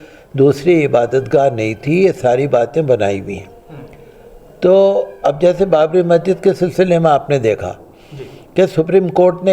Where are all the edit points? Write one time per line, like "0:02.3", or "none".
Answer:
none